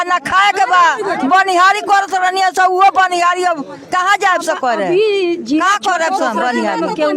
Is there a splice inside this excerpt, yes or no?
no